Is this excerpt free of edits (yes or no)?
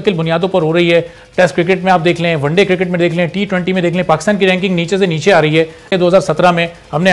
no